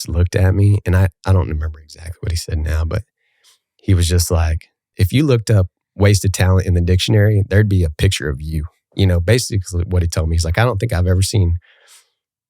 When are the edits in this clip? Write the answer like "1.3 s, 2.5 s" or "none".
4.9 s

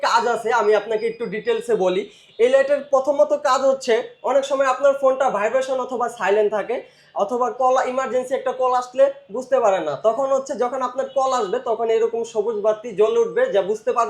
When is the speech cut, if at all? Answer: none

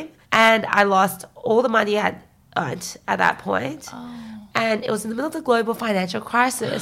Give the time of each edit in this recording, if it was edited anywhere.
none

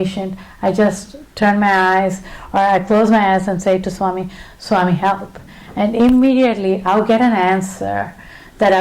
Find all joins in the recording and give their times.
none

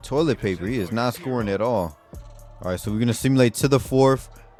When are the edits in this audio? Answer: none

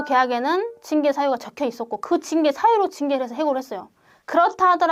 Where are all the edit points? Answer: none

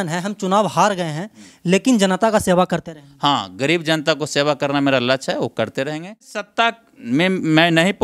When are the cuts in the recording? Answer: 6.5 s

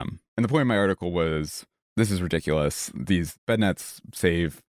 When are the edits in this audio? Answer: none

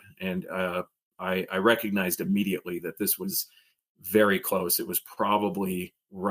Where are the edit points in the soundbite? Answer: none

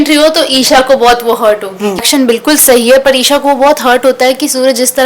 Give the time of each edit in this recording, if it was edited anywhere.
2.1 s

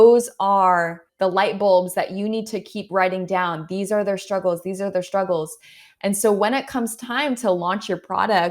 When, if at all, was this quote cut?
1.1 s

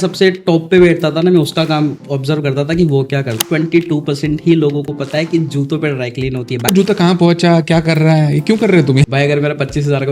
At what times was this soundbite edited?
3.4 s, 6.7 s, 9.0 s

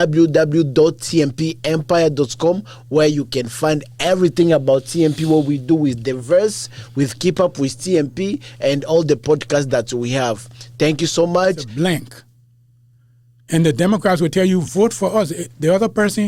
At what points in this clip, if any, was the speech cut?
11.7 s

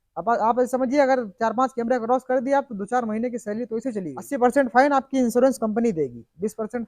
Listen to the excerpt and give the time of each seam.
4.2 s

